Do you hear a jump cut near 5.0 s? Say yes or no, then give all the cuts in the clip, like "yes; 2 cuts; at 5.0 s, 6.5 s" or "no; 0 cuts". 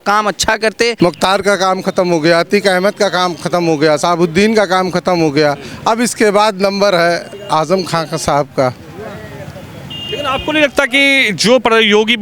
no; 1 cut; at 0.9 s